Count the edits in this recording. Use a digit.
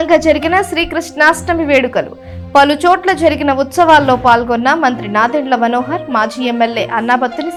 0